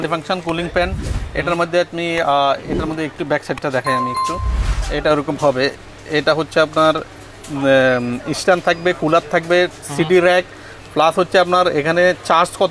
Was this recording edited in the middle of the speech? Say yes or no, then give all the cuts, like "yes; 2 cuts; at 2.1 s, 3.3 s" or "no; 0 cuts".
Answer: no; 0 cuts